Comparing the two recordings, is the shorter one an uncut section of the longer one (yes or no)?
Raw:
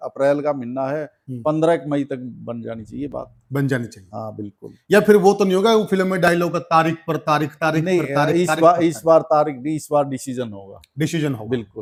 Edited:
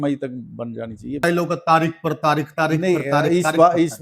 no